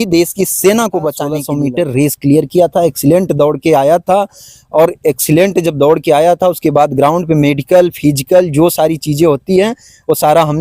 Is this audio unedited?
no; 1 cut; at 1.4 s

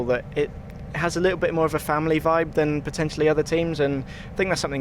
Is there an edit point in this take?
no; 0 cuts

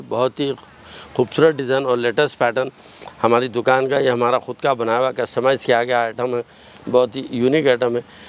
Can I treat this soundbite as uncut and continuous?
yes; 0 cuts

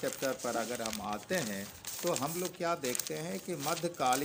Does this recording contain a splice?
no; 0 cuts

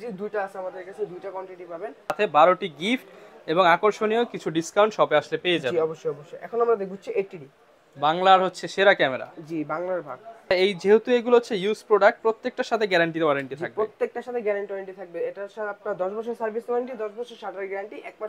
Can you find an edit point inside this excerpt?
yes; 2 cuts; at 2.1 s, 10.5 s

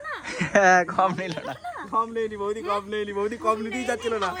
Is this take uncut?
yes; 0 cuts

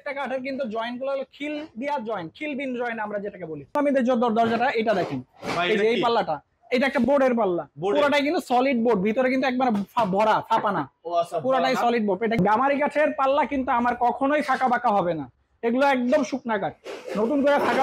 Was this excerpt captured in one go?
no; 2 cuts; at 3.7 s, 12.4 s

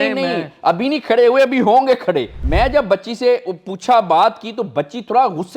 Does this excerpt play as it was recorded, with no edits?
no; 1 cut; at 2.3 s

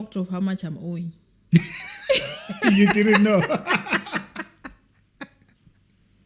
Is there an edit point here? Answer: no; 0 cuts

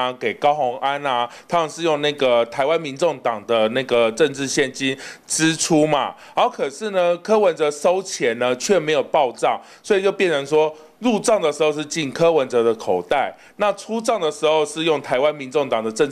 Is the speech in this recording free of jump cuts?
yes; 0 cuts

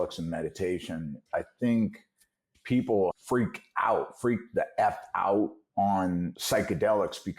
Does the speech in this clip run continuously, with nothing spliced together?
no; 4 cuts; at 1.2 s, 2.5 s, 3.1 s, 6.4 s

